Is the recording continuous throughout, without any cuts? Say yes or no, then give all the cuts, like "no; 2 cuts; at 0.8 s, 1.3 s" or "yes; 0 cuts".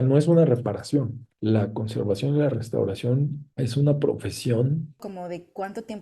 no; 1 cut; at 5.0 s